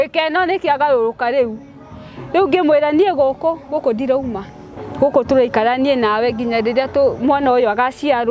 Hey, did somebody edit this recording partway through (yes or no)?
no